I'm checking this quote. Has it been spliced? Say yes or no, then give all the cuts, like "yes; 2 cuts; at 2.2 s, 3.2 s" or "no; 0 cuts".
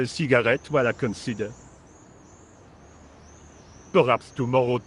no; 0 cuts